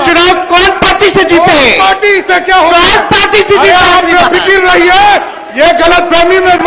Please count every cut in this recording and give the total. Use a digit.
0